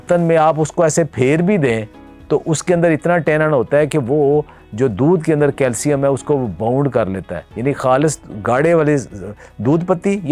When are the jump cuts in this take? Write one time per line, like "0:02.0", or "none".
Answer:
none